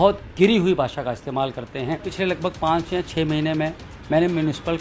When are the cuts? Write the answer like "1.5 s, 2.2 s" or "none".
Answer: 2.1 s